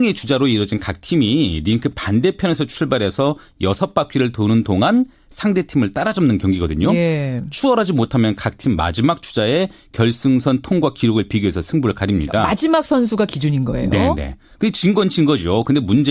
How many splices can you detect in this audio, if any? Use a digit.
0